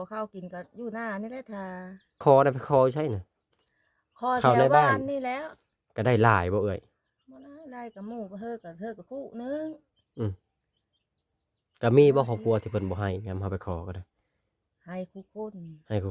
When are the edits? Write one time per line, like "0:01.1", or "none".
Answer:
0:02.2